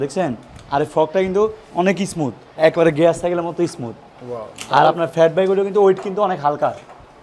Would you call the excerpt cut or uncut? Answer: uncut